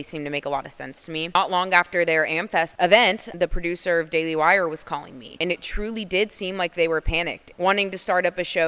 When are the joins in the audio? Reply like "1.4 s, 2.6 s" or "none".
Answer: 1.3 s, 2.7 s, 3.3 s, 7.4 s